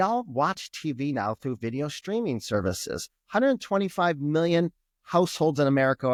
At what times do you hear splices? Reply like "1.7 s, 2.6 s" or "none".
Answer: none